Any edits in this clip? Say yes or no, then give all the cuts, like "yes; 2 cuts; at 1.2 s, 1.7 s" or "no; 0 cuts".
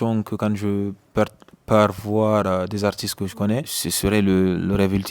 yes; 1 cut; at 3.8 s